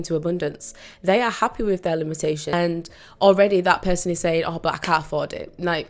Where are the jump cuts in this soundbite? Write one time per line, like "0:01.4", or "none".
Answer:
0:02.5